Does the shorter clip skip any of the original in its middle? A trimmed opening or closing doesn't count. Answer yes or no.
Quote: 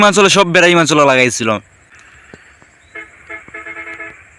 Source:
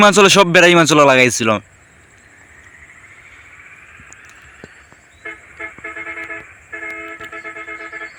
yes